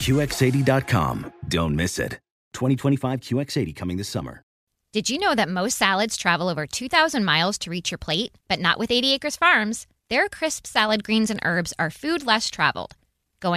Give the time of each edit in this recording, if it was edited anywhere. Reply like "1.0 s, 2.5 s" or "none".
4.6 s